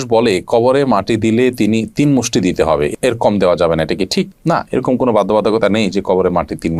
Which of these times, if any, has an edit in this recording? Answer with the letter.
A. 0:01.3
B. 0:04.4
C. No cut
C